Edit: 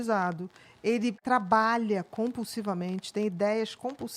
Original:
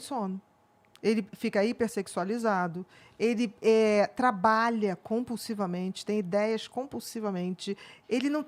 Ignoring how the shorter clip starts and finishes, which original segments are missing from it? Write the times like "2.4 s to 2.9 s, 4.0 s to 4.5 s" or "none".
3.6 s to 4.1 s